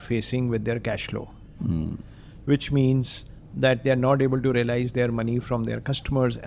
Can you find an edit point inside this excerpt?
no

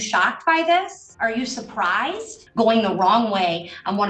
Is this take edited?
yes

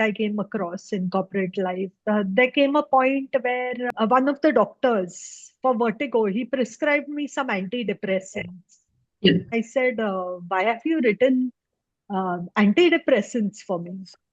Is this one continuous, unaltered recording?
no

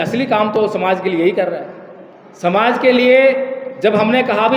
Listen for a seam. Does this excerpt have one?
no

